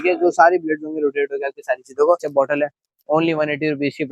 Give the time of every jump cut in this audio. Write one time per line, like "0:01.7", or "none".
0:02.3